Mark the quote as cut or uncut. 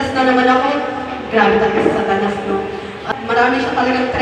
cut